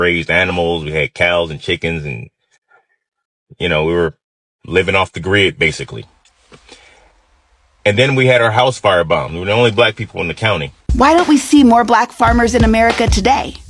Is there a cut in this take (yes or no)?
yes